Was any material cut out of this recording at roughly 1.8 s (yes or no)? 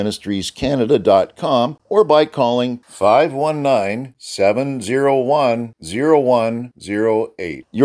yes